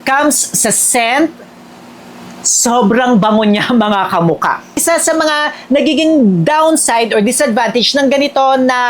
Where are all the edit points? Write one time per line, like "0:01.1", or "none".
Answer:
0:04.8